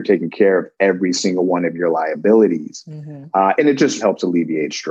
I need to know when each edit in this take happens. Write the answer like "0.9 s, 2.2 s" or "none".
4.0 s